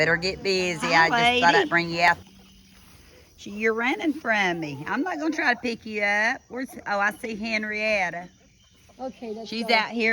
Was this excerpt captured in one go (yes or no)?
no